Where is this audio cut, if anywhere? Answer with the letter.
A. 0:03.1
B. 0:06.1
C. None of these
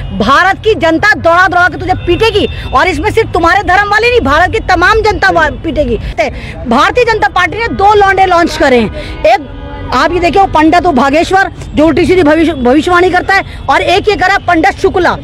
B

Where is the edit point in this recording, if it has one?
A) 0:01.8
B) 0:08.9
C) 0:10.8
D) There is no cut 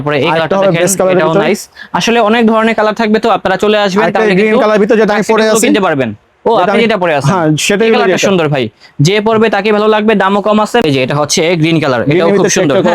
C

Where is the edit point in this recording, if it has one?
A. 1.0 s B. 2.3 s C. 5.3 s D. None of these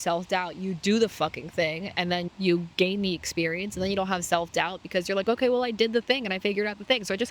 B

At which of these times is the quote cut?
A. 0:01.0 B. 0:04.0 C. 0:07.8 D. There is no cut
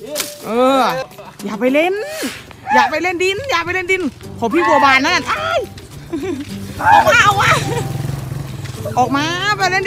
A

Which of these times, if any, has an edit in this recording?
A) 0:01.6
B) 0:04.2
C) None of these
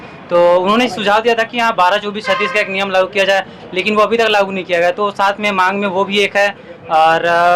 C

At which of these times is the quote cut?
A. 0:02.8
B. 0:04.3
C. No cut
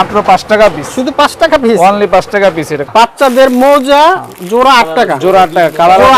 A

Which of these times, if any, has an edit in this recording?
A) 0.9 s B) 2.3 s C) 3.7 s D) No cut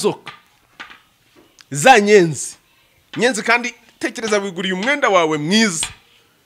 D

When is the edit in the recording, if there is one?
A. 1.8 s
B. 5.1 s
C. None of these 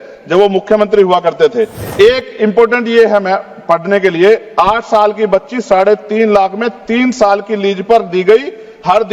A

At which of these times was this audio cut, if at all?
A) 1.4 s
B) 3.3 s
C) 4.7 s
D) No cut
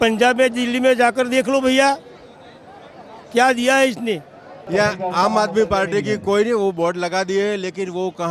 C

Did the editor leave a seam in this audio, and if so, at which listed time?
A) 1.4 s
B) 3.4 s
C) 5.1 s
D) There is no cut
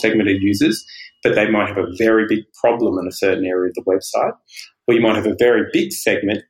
D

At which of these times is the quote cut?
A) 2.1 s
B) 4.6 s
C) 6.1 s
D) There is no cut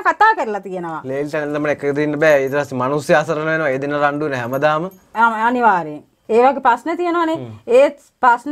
C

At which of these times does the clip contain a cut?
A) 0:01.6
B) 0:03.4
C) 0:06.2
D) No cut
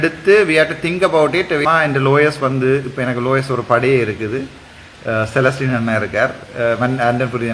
A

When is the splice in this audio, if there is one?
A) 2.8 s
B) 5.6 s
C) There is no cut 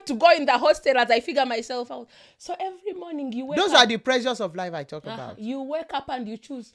C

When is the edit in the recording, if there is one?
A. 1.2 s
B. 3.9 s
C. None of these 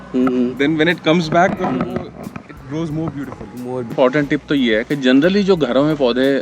B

